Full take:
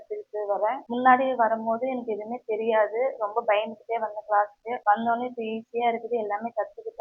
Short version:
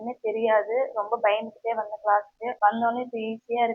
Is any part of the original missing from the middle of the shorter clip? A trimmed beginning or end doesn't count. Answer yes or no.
no